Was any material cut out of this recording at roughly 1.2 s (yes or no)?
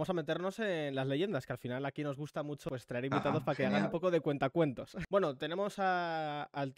no